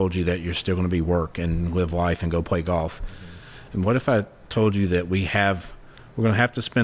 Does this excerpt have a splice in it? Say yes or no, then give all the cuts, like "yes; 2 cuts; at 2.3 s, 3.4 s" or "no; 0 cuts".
no; 0 cuts